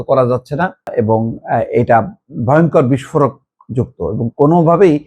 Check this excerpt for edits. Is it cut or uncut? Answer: cut